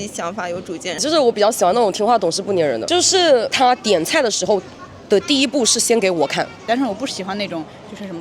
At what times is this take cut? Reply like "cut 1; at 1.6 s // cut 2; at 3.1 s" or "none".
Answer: cut 1; at 1.0 s // cut 2; at 3.5 s // cut 3; at 6.6 s